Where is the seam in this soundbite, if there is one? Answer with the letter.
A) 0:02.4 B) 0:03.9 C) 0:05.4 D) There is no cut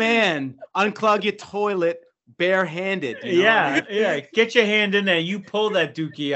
B